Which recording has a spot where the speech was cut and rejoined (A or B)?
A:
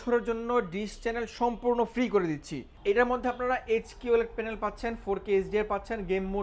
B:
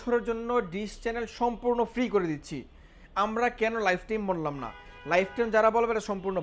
A